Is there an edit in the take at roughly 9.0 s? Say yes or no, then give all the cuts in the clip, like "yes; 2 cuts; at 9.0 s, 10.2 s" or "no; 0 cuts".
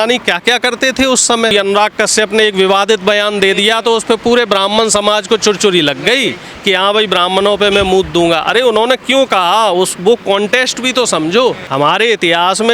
no; 2 cuts; at 1.5 s, 11.6 s